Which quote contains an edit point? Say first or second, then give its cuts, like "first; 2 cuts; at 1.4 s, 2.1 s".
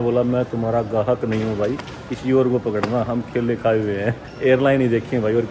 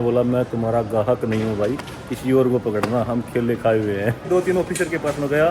second; 1 cut; at 4.3 s